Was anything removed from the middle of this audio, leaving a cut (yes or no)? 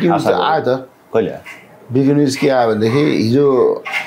no